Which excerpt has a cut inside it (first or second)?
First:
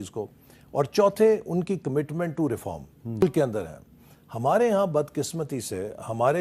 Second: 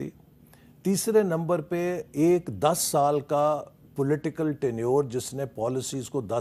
first